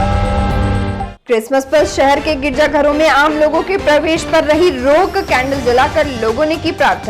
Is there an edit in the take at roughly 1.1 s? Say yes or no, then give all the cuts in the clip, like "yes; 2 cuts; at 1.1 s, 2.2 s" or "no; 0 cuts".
yes; 1 cut; at 1.1 s